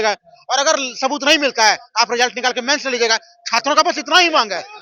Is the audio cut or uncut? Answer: uncut